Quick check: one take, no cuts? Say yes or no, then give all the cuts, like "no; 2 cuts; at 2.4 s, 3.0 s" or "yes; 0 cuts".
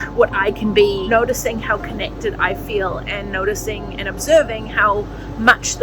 no; 1 cut; at 1.0 s